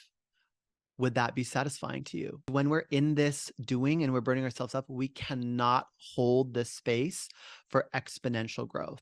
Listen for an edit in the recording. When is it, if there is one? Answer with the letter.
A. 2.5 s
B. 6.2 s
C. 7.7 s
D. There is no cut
A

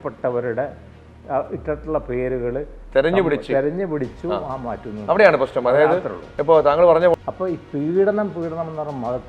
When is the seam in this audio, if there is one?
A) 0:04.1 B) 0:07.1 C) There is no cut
B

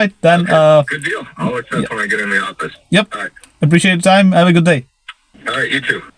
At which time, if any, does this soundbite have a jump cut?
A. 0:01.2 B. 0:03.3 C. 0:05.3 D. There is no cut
C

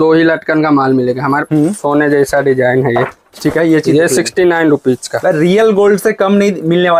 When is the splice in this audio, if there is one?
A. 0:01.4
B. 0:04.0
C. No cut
A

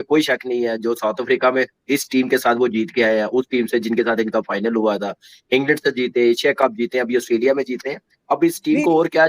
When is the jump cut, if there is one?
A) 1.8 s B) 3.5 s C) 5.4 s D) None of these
D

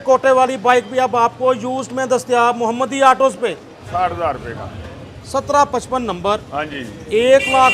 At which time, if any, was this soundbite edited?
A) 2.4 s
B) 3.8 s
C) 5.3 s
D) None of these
B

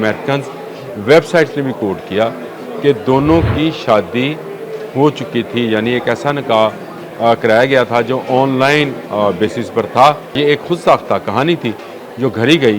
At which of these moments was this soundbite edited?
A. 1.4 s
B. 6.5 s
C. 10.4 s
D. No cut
C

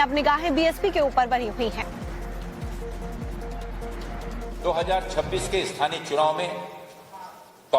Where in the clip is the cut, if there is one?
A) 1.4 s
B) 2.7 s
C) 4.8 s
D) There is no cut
B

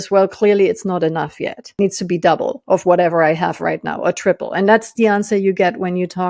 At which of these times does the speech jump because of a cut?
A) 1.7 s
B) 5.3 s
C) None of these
A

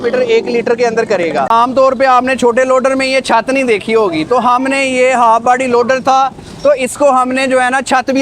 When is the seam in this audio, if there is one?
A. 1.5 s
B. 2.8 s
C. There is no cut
A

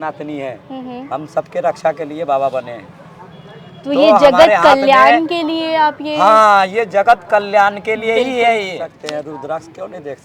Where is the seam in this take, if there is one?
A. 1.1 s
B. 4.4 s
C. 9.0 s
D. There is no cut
C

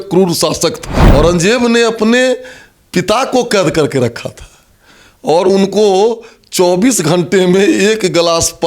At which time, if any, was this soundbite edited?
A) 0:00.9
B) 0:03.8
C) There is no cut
A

